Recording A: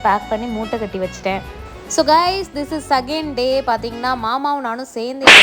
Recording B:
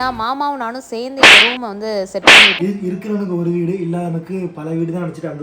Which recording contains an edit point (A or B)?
B